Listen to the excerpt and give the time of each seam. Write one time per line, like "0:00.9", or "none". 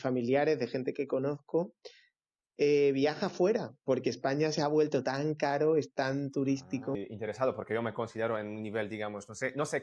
0:07.0